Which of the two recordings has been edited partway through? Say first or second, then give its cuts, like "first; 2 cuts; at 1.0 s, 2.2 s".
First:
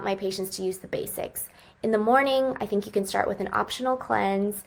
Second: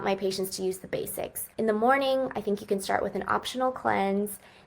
second; 1 cut; at 1.4 s